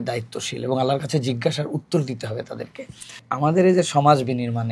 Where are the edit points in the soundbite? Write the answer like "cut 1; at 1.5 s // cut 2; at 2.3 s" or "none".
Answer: cut 1; at 3.2 s